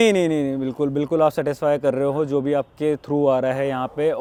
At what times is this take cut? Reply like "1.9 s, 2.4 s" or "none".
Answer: none